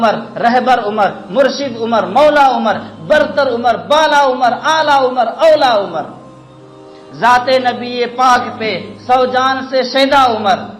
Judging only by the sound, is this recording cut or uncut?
uncut